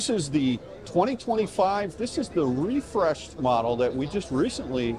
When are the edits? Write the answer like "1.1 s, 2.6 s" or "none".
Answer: none